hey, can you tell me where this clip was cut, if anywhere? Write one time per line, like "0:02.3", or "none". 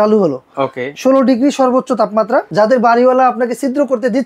0:02.5